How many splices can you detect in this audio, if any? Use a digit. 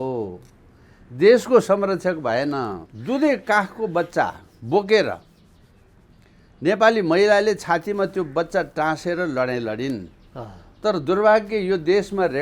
1